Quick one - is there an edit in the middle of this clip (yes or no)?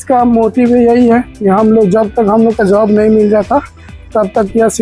yes